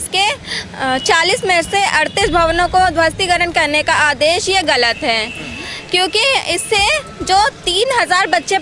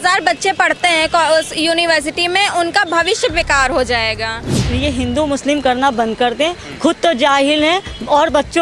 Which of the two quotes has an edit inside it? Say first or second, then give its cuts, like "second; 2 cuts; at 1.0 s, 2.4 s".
second; 1 cut; at 4.6 s